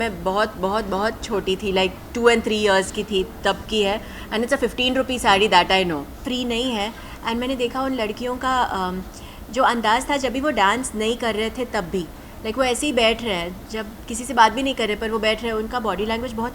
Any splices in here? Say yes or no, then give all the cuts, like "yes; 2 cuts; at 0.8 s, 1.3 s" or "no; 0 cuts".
yes; 1 cut; at 6.2 s